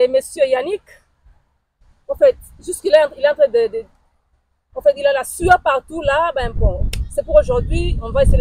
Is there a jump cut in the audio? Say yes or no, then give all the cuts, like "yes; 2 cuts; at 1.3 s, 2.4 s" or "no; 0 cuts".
no; 0 cuts